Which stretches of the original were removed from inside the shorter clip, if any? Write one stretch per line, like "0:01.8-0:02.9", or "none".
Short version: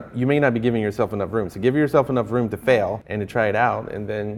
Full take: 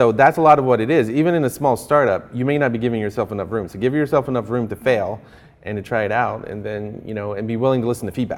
0:05.2-0:05.6